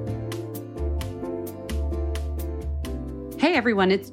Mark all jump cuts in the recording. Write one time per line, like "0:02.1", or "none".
0:02.7